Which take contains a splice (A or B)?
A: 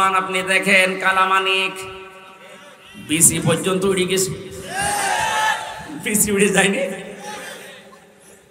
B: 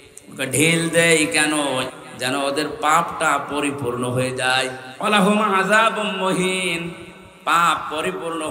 B